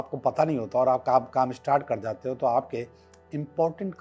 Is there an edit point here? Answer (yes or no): no